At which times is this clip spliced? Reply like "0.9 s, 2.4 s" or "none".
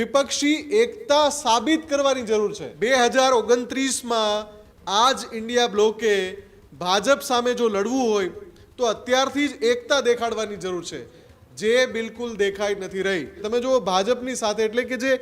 2.7 s, 13.4 s